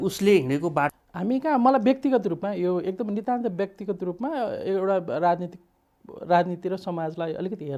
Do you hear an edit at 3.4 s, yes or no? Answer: no